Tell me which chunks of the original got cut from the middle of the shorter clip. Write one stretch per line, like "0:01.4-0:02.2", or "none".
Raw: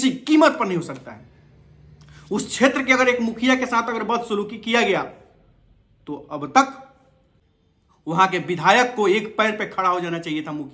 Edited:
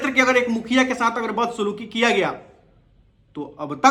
none